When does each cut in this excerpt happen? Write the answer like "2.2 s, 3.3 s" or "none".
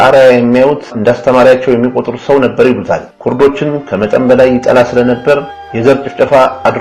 none